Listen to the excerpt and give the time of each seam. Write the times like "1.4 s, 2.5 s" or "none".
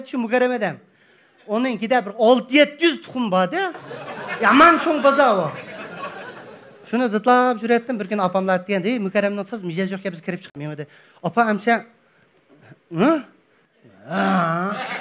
10.5 s